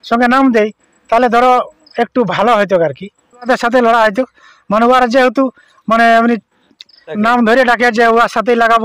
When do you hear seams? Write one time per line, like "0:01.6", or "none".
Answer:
0:03.5
0:07.2